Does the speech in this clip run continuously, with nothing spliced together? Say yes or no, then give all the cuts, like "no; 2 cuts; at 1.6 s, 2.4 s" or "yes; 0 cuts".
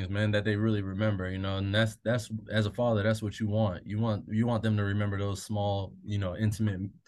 yes; 0 cuts